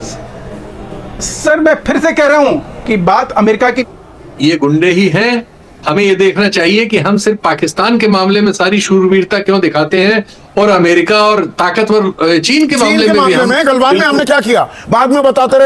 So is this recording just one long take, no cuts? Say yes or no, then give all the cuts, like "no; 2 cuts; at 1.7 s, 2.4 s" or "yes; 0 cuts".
no; 1 cut; at 3.8 s